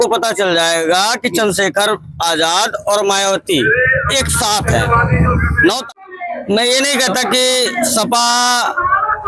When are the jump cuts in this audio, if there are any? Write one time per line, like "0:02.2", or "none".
0:06.1